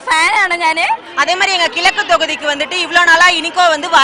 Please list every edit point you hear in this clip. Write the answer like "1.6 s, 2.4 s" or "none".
1.1 s